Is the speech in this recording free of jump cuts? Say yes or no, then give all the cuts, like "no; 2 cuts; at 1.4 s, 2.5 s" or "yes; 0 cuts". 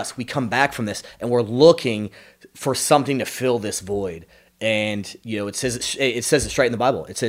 yes; 0 cuts